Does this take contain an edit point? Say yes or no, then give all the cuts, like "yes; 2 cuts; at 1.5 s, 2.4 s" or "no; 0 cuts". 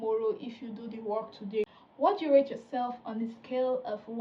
yes; 1 cut; at 1.6 s